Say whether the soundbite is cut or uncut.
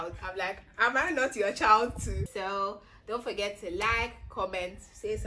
cut